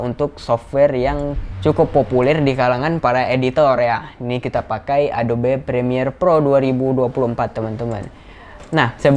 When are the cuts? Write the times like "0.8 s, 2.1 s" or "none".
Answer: none